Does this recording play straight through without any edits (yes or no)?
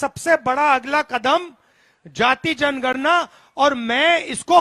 yes